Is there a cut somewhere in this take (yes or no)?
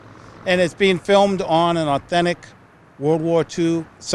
no